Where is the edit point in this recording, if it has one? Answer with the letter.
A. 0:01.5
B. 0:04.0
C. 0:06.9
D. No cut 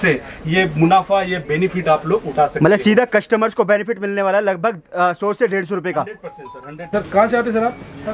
C